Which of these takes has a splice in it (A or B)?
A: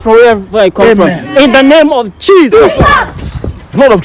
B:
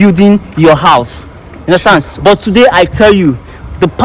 A